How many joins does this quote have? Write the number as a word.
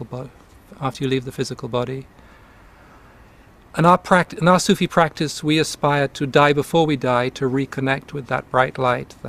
one